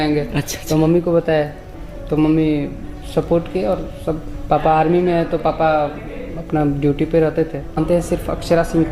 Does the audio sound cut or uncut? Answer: cut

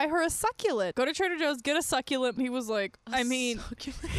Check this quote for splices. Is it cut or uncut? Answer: cut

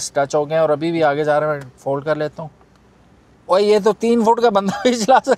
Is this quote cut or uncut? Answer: uncut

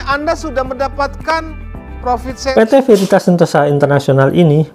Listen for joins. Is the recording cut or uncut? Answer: cut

